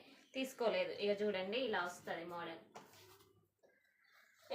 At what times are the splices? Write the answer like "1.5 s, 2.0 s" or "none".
3.6 s